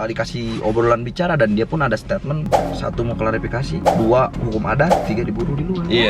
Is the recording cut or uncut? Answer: uncut